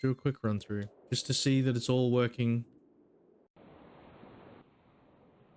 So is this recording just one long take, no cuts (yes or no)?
no